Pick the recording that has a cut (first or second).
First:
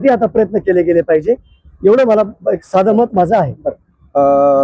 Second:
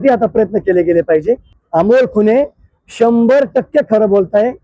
second